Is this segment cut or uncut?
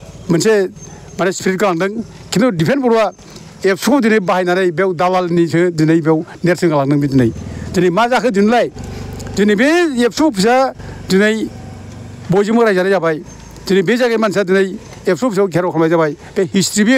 uncut